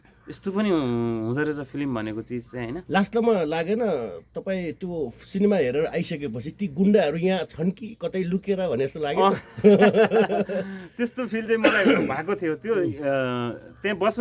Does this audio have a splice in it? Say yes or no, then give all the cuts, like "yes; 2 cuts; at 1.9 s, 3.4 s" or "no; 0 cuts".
no; 0 cuts